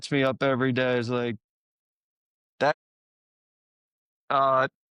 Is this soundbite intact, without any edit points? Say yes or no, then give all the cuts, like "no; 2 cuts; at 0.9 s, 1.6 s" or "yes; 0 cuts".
yes; 0 cuts